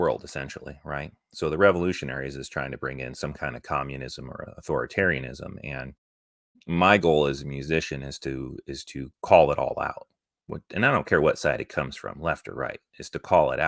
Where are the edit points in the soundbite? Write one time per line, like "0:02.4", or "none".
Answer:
none